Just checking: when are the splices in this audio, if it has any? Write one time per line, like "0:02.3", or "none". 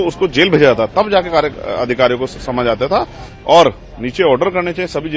0:03.3